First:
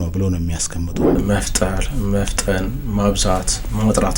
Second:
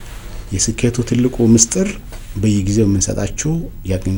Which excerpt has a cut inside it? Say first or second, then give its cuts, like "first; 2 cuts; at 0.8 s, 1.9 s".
first; 1 cut; at 1.2 s